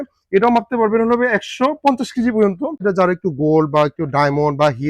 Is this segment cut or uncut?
cut